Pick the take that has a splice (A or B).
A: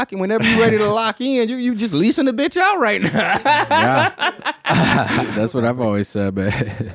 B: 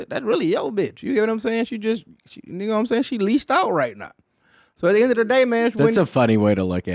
A